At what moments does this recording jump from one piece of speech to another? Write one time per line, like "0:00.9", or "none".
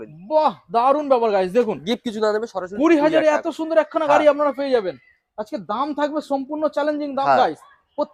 none